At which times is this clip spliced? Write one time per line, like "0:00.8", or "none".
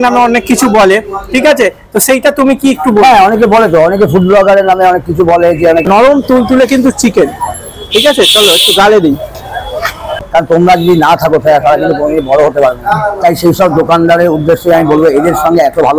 0:05.8
0:10.2